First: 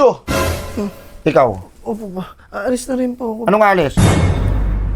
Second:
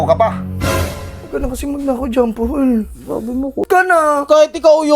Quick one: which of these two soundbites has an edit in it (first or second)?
second